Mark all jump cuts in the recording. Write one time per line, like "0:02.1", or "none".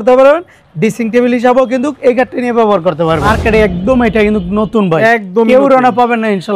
0:03.2